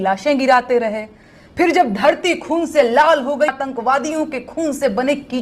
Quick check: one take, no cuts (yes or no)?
no